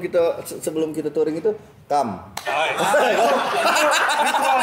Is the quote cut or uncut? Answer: uncut